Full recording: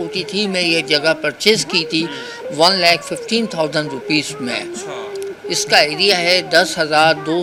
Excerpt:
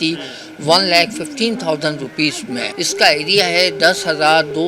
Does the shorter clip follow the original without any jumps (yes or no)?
no